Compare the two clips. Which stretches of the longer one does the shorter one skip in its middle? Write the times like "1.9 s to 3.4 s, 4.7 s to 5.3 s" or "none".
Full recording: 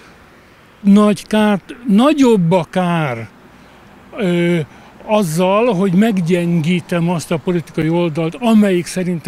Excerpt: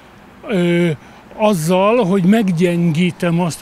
none